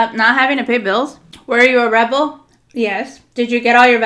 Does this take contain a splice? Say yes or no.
yes